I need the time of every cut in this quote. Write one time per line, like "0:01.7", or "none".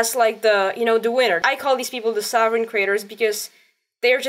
0:01.4